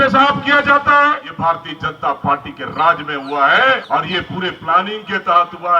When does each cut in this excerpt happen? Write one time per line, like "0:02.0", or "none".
0:01.3
0:03.8